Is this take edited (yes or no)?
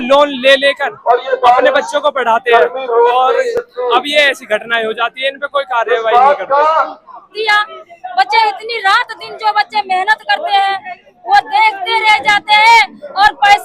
no